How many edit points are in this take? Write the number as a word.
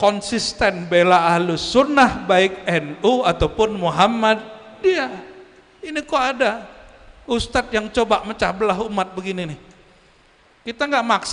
zero